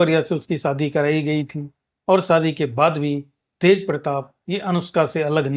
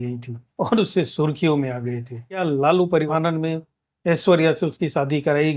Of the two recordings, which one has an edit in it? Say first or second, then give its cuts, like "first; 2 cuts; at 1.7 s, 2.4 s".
second; 1 cut; at 3.1 s